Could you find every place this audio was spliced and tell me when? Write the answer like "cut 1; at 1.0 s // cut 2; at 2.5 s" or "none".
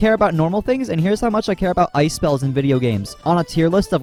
none